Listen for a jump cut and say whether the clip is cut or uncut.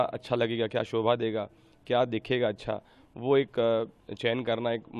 uncut